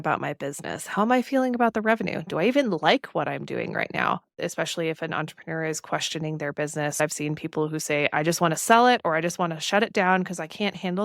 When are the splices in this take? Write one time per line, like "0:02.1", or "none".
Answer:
0:04.4
0:07.0